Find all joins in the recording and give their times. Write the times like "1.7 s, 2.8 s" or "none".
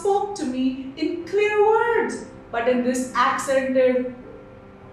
none